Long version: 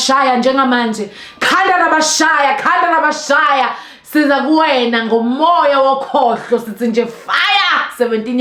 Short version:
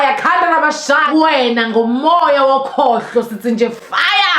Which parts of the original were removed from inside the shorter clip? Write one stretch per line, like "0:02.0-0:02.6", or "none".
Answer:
0:03.5-0:04.4